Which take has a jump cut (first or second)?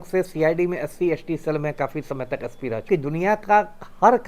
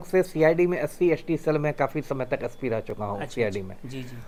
first